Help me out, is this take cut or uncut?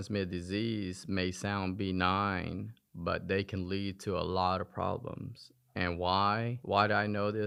uncut